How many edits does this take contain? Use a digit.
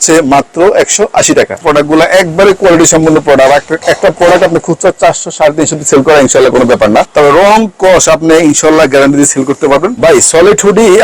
3